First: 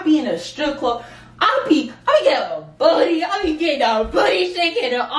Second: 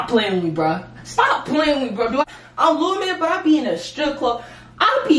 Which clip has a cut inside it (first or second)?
second